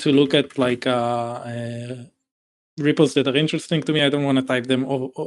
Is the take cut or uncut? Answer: uncut